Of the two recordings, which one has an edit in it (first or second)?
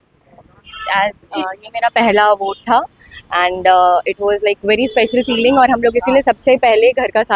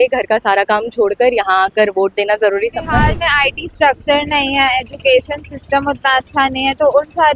second